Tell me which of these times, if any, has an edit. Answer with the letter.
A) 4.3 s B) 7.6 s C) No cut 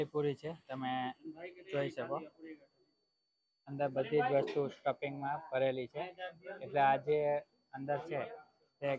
C